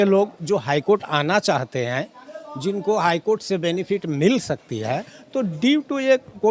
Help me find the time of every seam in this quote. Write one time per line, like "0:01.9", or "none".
none